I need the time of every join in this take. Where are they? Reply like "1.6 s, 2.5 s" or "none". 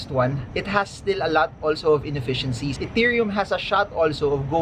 2.7 s